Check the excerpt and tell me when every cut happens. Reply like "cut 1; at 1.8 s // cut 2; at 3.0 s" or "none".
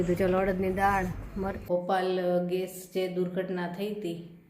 cut 1; at 1.6 s